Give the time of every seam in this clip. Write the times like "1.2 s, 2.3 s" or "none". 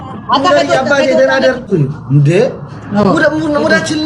1.7 s